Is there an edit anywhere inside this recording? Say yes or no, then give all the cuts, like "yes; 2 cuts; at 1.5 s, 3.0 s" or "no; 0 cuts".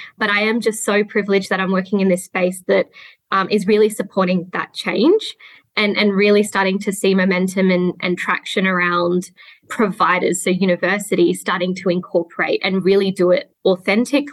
no; 0 cuts